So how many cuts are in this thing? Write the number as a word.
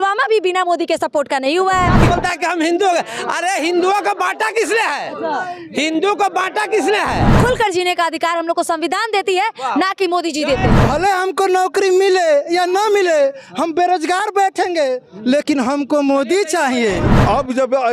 four